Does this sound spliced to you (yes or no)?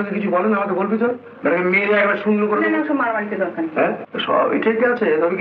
yes